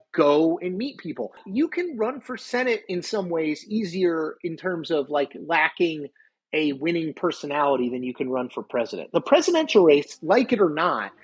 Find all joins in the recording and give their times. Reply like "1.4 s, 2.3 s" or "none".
1.4 s

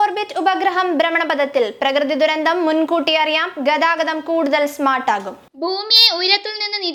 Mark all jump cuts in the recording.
none

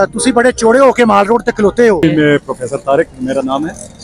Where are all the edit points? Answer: 2.0 s

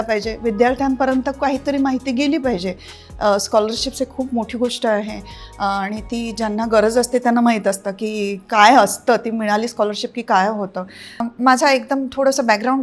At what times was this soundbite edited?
11.2 s

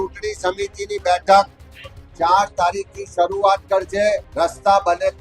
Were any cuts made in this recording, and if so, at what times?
4.3 s

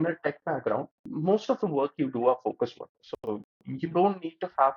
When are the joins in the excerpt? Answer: 1.0 s

